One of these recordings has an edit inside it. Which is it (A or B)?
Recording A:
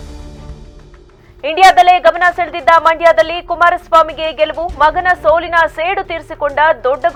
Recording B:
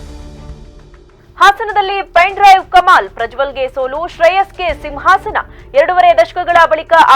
B